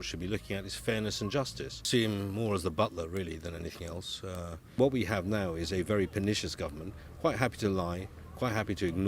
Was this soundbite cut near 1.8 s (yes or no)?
yes